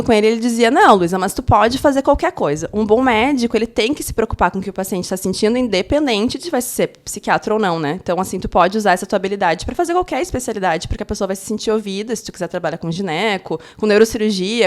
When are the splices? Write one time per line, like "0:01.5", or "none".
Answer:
none